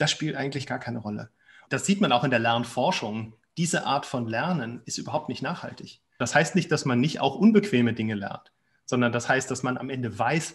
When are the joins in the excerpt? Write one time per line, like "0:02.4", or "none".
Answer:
0:01.6
0:06.2